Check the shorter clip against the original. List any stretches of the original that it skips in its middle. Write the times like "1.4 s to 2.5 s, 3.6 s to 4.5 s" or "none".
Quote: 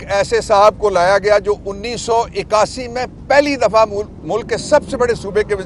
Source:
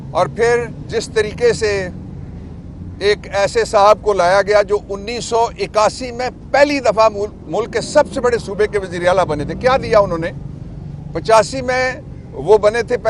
none